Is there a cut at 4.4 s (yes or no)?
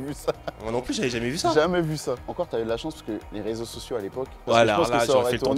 yes